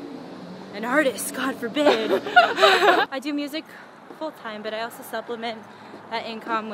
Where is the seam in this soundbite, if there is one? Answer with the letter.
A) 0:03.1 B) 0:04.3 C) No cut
A